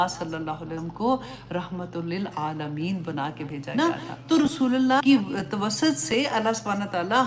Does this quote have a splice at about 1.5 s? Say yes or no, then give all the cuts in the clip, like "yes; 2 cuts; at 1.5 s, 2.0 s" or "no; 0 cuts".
no; 2 cuts; at 3.6 s, 5.0 s